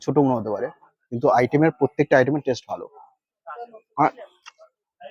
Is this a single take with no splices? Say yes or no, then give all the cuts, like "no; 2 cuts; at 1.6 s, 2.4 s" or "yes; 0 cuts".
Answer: yes; 0 cuts